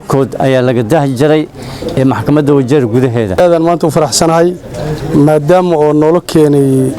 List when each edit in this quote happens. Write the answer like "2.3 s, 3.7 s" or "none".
3.5 s